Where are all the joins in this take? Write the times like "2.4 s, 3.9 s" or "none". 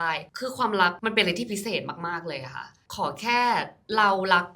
2.8 s